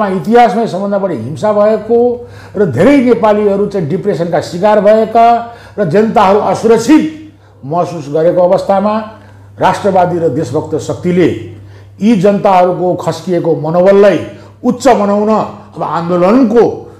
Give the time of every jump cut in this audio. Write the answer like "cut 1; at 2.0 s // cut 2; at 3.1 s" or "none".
none